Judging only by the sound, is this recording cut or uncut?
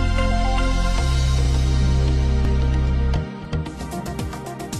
uncut